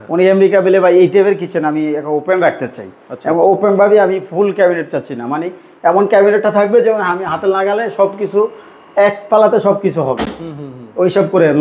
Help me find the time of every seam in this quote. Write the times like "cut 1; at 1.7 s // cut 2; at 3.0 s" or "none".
none